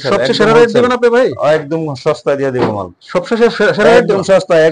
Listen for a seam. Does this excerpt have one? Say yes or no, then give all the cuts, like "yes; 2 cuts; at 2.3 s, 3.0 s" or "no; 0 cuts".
no; 0 cuts